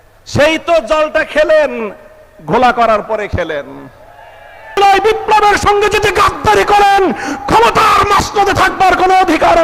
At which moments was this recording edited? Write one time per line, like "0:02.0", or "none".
0:04.8

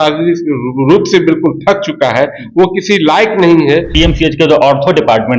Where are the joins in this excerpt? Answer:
0:03.9

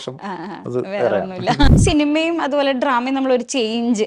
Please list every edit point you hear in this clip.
0:01.8

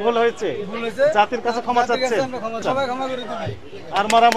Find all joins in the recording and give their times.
0:02.6

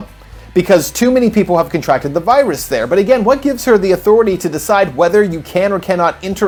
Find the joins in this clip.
none

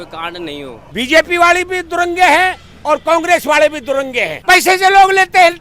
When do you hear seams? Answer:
0:00.9
0:04.4

